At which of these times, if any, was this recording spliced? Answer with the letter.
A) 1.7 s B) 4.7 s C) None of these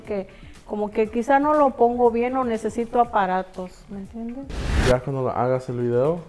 B